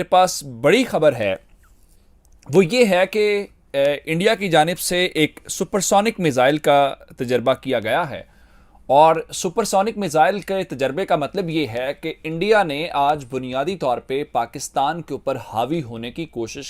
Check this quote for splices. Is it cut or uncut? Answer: uncut